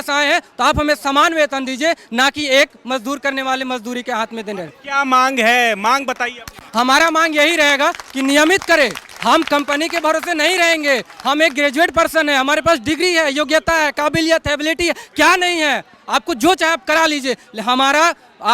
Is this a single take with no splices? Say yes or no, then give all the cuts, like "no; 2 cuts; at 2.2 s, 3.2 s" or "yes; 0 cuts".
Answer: yes; 0 cuts